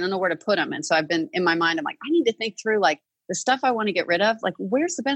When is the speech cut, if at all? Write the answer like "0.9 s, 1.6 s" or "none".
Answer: none